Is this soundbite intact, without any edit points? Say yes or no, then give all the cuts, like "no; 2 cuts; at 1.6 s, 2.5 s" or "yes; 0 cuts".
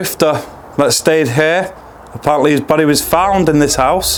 yes; 0 cuts